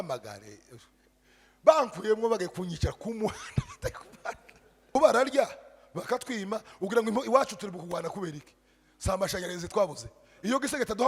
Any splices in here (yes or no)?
yes